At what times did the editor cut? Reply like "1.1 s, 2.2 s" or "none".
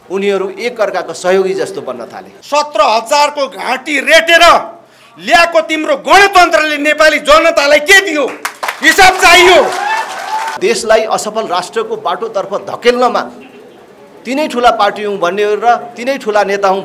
2.3 s, 10.5 s